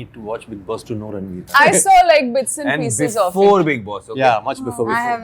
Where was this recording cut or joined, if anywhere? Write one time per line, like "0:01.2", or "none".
0:01.5